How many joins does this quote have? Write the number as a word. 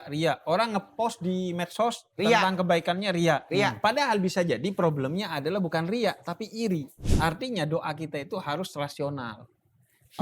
one